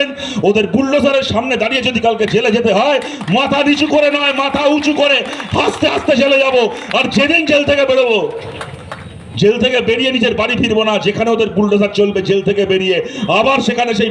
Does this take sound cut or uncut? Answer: uncut